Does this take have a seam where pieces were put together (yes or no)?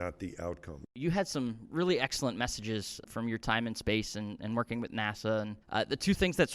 yes